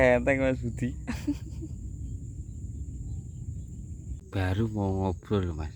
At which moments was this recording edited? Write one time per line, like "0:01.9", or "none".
0:04.2